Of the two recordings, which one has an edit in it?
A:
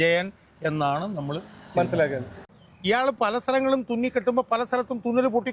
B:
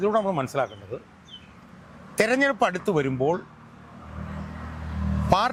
A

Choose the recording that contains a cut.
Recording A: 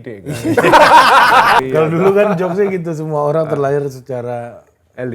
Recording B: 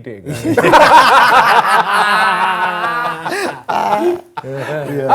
A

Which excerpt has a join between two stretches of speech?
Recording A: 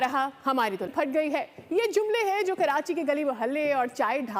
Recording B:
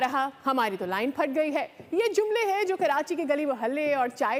A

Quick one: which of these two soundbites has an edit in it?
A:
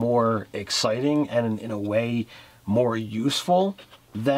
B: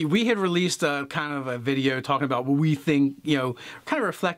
A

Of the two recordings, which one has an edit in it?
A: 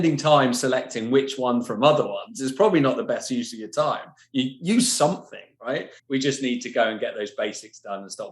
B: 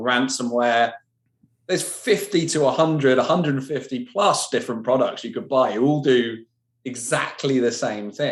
A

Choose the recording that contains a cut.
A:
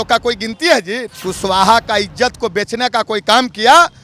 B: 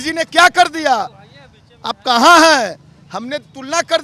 A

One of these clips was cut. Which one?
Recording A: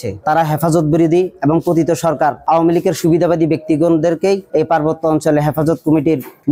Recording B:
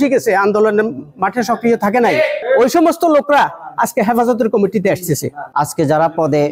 B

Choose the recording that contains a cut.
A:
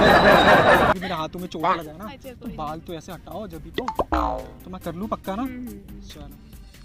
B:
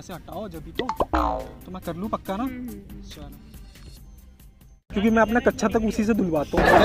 B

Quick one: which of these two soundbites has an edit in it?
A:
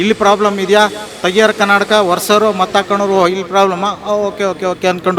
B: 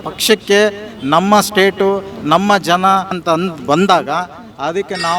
B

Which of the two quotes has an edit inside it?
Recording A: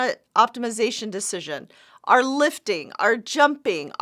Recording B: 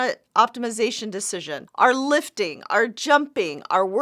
B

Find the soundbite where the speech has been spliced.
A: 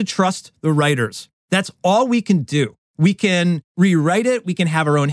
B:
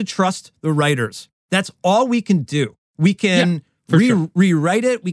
A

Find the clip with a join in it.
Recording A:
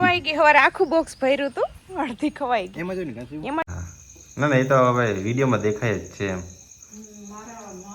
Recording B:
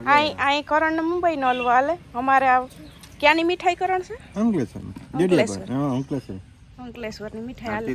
A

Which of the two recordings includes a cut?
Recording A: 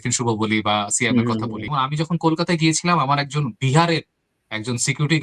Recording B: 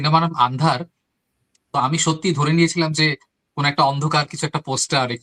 A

